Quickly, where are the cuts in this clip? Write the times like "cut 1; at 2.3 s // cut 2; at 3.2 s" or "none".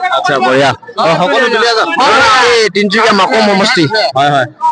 none